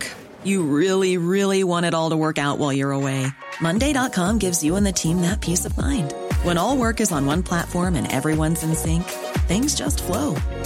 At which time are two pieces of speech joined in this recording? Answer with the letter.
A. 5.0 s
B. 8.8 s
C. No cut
C